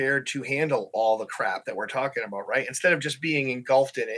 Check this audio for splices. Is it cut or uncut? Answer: uncut